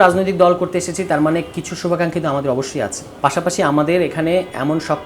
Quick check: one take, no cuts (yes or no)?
no